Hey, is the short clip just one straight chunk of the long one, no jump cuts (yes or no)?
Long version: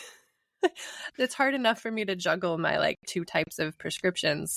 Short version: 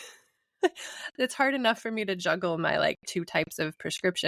yes